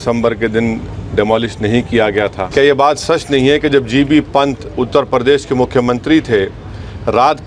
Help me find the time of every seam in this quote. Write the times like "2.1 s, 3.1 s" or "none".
2.4 s